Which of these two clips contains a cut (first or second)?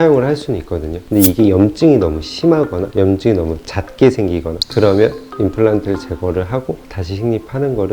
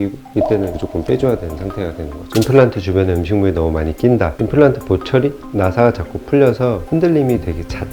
second